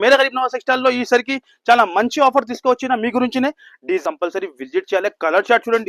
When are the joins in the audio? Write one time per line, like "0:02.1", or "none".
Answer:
0:04.0